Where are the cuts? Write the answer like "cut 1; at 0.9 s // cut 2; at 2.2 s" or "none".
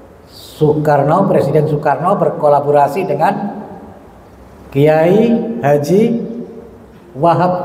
none